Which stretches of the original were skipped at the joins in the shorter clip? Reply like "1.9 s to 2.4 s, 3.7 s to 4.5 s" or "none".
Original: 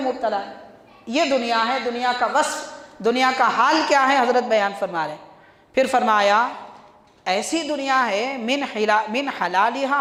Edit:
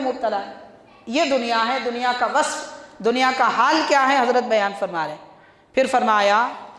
none